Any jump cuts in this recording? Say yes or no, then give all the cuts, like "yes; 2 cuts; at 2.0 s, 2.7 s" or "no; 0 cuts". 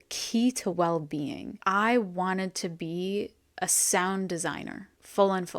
yes; 1 cut; at 1.6 s